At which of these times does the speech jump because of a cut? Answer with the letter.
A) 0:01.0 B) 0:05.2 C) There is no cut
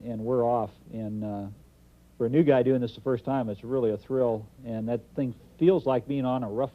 B